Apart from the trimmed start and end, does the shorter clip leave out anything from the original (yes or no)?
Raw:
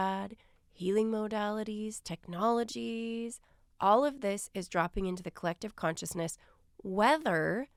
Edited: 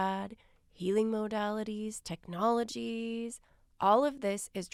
no